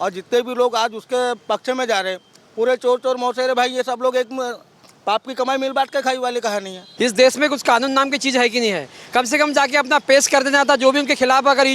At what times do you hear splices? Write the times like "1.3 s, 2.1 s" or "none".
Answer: 6.8 s